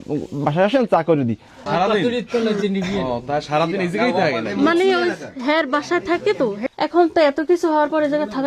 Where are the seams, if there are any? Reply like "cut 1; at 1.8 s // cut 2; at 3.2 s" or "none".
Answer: cut 1; at 1.7 s